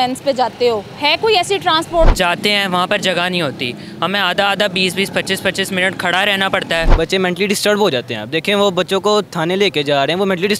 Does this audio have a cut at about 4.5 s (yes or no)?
no